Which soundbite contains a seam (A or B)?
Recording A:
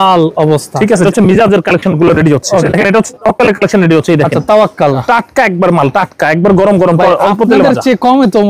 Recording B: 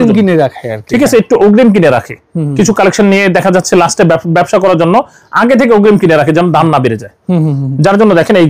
A